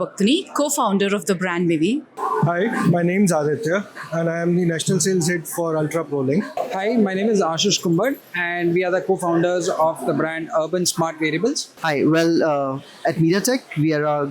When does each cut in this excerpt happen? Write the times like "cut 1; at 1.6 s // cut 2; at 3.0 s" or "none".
cut 1; at 2.1 s // cut 2; at 6.6 s // cut 3; at 11.7 s